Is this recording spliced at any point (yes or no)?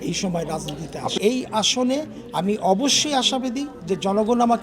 yes